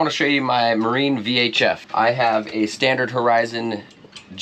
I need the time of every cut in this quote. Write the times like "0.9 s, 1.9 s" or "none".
1.8 s